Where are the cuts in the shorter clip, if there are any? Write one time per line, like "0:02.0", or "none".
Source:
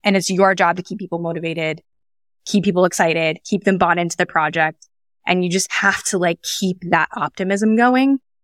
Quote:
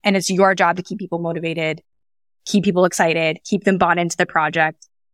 none